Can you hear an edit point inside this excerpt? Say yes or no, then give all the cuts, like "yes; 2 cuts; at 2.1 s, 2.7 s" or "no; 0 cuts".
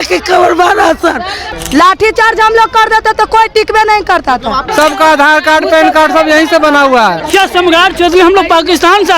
yes; 3 cuts; at 1.4 s, 4.7 s, 7.2 s